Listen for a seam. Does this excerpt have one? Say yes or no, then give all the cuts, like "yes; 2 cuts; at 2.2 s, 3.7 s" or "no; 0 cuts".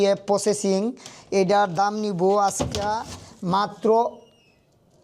no; 0 cuts